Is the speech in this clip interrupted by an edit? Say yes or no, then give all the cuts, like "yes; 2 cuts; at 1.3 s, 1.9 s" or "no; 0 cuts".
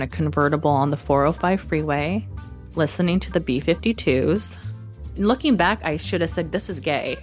no; 0 cuts